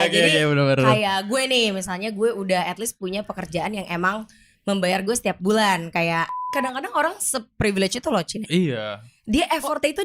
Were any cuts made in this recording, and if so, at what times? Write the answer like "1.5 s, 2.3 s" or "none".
6.4 s